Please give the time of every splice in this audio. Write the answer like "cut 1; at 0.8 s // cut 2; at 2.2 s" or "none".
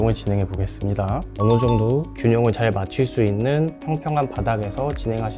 cut 1; at 1.3 s